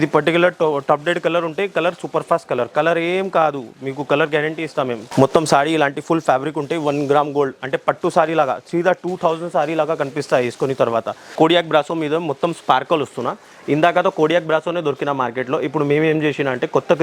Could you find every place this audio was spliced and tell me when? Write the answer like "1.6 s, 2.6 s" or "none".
5.1 s, 11.3 s